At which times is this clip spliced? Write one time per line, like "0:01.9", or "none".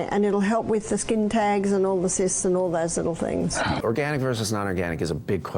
0:03.8